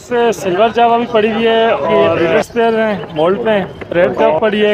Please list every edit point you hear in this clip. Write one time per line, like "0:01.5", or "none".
0:02.3
0:03.9